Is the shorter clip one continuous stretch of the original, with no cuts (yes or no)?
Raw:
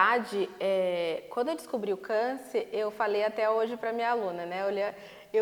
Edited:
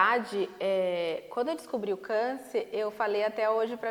yes